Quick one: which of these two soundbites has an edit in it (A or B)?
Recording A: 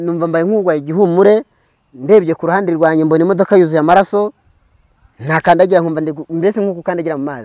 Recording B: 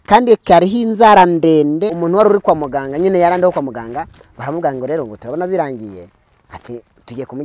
B